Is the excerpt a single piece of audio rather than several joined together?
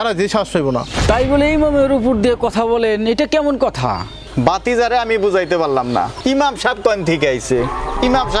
no; 1 cut; at 0.9 s

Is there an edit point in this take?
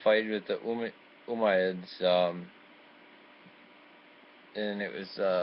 no; 0 cuts

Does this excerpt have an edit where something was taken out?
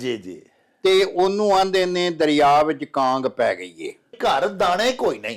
yes; 1 cut; at 4.1 s

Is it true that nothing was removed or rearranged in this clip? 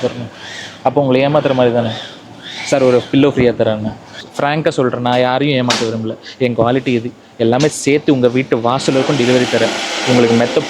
no; 1 cut; at 4.2 s

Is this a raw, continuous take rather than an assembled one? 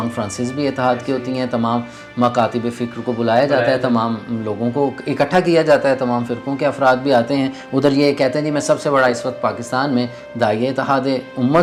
yes; 0 cuts

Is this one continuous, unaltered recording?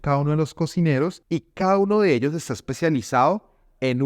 no; 1 cut; at 1.2 s

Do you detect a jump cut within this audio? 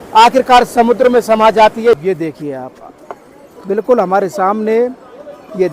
yes; 1 cut; at 2.0 s

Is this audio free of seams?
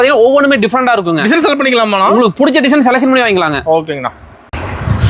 yes; 0 cuts

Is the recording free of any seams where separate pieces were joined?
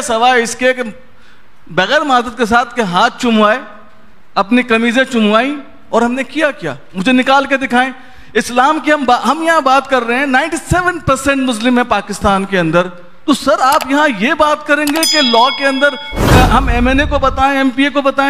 yes; 0 cuts

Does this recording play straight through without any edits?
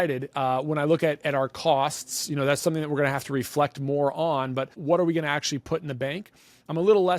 no; 1 cut; at 4.8 s

